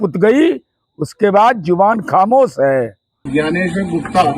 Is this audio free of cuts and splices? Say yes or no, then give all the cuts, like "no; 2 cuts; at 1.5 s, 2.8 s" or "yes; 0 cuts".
no; 1 cut; at 3.2 s